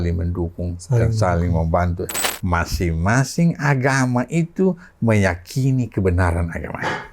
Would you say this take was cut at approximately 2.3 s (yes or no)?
yes